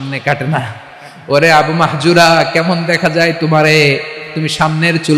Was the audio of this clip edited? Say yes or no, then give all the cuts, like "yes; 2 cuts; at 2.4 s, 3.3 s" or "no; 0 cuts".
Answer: no; 0 cuts